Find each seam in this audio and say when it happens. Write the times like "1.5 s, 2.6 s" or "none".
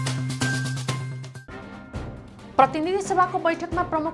1.3 s